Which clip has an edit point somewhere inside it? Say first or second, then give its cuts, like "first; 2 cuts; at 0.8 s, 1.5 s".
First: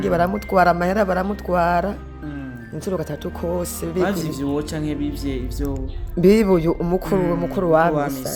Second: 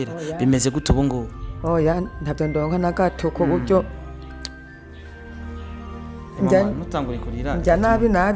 second; 2 cuts; at 4.3 s, 6.3 s